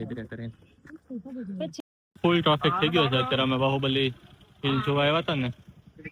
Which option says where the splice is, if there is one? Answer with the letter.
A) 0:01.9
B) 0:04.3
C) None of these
A